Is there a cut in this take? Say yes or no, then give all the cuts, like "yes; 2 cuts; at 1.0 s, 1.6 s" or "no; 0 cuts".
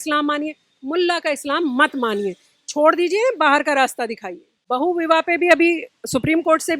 no; 0 cuts